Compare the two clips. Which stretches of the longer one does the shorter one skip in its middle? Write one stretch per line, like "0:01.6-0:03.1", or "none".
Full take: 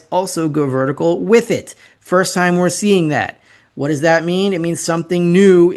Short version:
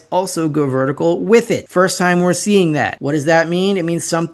0:01.6-0:02.0
0:03.3-0:03.7